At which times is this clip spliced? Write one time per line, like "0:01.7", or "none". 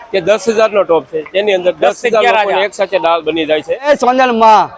0:03.8